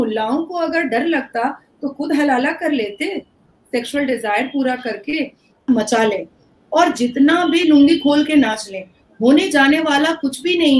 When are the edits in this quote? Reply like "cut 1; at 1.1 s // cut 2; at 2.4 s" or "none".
cut 1; at 5.6 s